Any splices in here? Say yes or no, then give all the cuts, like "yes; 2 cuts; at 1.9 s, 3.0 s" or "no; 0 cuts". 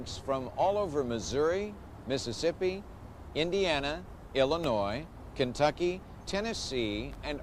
no; 0 cuts